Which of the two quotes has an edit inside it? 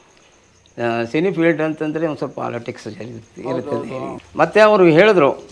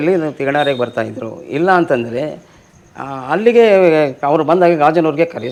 first; 1 cut; at 4.2 s

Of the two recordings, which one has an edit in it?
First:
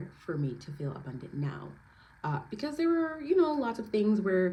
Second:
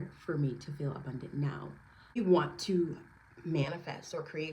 second; 1 cut; at 2.2 s

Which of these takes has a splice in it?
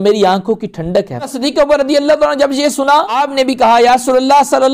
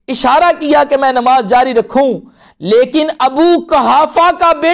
first; 2 cuts; at 1.3 s, 3.1 s

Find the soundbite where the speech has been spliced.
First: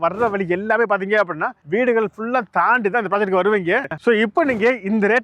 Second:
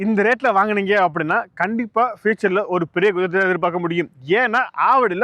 first; 1 cut; at 3.9 s

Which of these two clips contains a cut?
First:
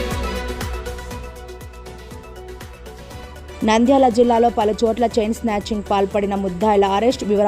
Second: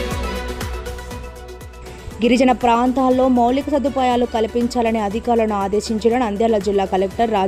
first; 1 cut; at 1.7 s

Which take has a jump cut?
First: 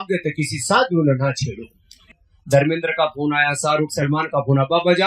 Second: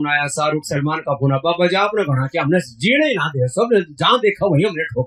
first; 1 cut; at 2.3 s

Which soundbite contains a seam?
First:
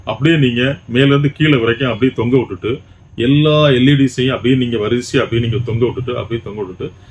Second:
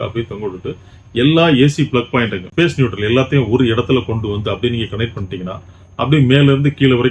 second; 1 cut; at 2.4 s

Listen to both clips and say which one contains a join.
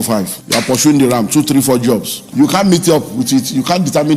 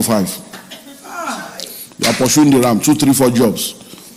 first; 2 cuts; at 0.8 s, 2.2 s

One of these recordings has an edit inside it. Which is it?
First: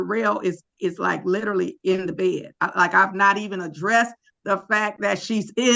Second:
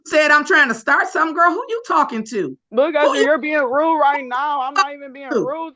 second; 1 cut; at 2.6 s

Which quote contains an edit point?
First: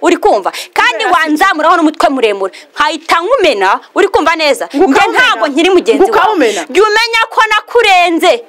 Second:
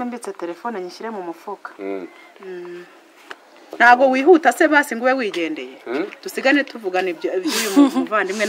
second; 1 cut; at 3.6 s

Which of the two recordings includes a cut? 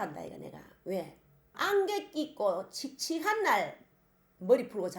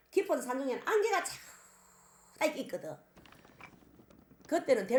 first; 1 cut; at 1.5 s

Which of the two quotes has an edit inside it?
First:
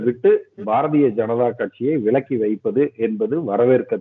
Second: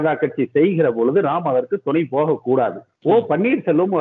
second; 1 cut; at 2.9 s

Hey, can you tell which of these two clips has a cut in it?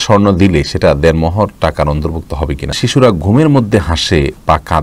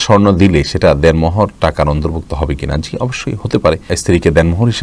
first; 1 cut; at 2.8 s

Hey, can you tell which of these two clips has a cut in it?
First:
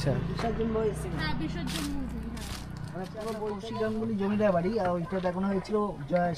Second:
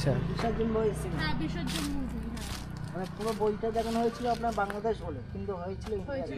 first; 1 cut; at 3.6 s

